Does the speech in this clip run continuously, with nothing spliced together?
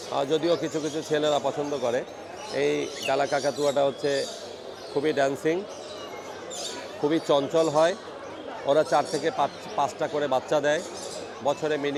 yes; 0 cuts

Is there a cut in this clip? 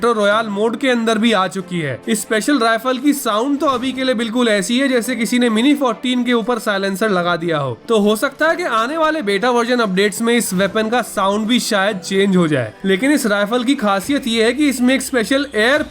no; 0 cuts

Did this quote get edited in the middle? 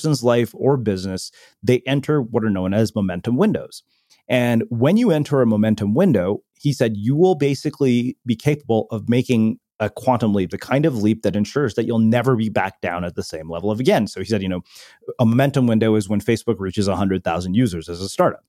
no; 0 cuts

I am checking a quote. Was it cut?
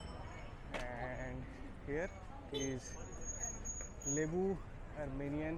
no; 0 cuts

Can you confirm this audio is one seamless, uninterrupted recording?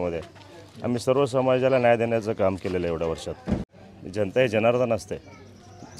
no; 1 cut; at 3.8 s

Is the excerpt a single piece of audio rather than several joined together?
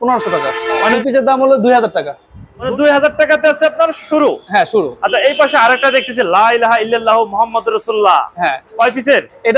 no; 2 cuts; at 1.0 s, 2.6 s

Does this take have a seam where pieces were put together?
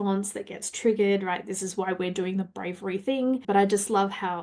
yes; 1 cut; at 3.4 s

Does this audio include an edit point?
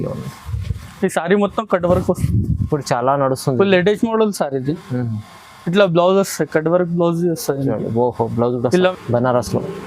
yes; 1 cut; at 8.9 s

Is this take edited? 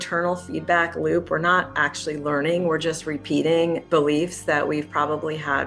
yes; 1 cut; at 3.8 s

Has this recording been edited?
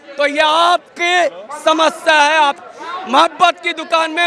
yes; 1 cut; at 2.6 s

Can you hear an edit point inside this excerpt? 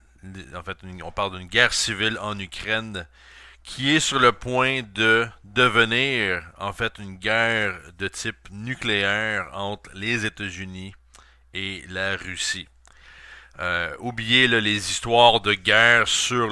yes; 1 cut; at 15.1 s

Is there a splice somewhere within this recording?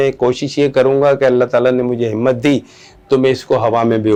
no; 0 cuts

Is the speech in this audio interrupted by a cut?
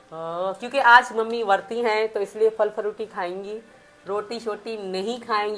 no; 0 cuts

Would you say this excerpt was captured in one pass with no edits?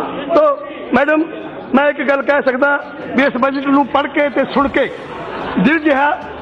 yes; 0 cuts

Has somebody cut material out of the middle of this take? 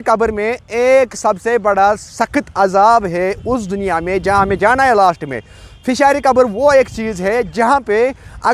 no; 0 cuts

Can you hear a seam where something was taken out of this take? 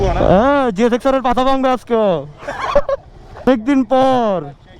yes; 1 cut; at 3.5 s

